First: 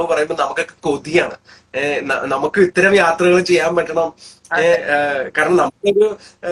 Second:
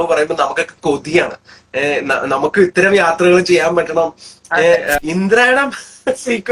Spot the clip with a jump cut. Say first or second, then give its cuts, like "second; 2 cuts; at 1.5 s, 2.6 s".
second; 1 cut; at 5.0 s